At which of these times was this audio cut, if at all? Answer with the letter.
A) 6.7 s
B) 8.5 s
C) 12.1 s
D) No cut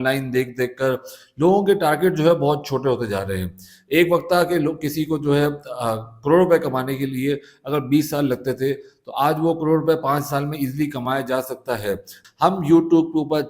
C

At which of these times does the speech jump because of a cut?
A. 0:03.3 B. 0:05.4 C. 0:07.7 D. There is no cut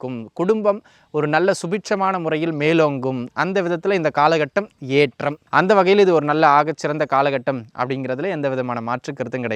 B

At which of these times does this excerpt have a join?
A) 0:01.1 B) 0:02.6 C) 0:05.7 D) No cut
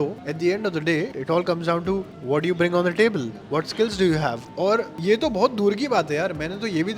A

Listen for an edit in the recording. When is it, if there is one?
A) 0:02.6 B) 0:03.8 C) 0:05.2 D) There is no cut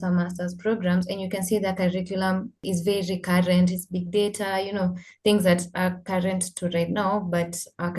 A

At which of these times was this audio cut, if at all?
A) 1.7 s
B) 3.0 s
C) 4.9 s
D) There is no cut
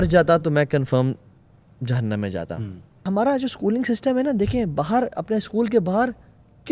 B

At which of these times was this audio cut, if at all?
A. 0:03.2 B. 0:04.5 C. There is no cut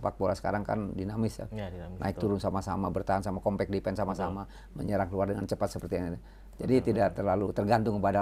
C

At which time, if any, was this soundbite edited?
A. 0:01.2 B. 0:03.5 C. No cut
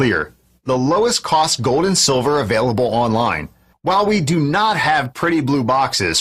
C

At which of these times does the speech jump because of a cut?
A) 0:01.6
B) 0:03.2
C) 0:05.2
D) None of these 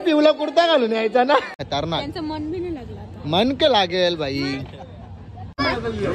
A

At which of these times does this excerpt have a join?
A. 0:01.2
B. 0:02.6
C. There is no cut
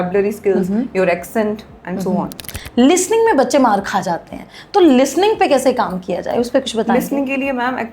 B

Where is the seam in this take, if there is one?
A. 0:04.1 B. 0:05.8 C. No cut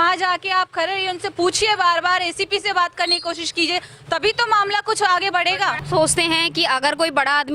B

